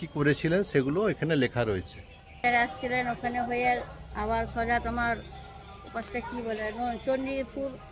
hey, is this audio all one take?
no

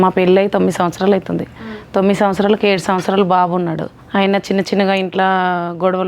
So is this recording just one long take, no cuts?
no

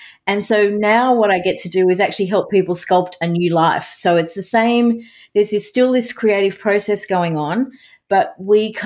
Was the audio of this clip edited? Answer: no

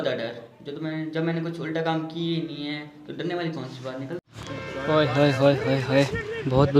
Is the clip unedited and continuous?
no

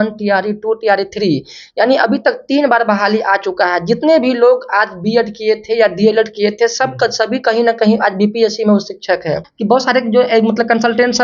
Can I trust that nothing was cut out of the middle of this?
no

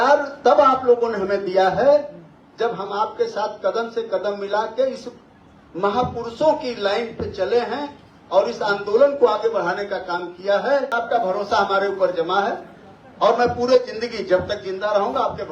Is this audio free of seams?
no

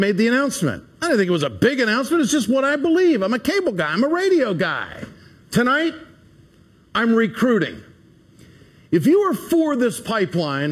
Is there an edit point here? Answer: no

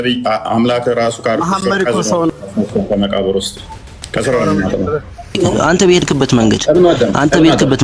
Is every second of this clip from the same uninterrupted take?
no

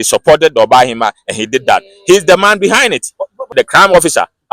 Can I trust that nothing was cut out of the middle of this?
no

